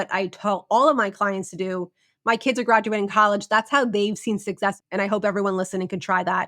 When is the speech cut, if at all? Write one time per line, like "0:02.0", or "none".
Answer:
0:04.8